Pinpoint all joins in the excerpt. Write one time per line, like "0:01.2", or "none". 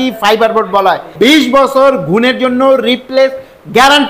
0:01.1